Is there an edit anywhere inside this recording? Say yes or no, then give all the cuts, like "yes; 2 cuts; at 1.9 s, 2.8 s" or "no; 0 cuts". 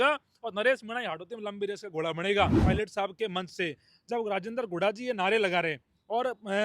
yes; 1 cut; at 2.6 s